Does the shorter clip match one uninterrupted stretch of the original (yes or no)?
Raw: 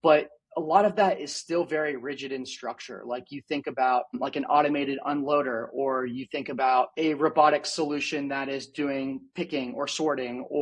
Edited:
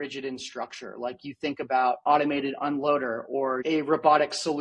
no